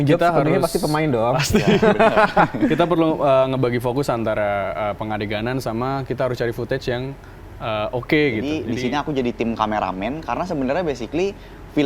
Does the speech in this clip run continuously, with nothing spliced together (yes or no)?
no